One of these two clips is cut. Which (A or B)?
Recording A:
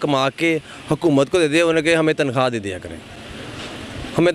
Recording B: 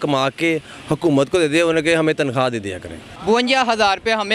B